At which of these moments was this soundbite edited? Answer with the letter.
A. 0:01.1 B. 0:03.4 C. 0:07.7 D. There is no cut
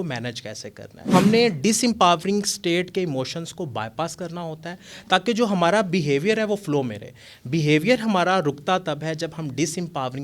A